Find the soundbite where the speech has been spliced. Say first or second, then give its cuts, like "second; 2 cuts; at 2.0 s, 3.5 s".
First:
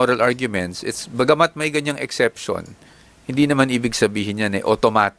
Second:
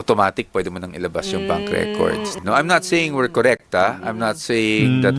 second; 1 cut; at 2.4 s